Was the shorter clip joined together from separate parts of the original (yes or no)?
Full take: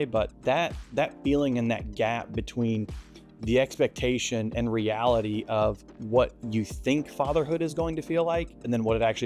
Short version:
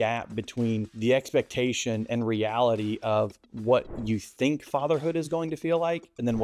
yes